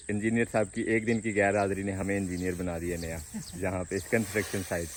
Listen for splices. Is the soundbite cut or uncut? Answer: uncut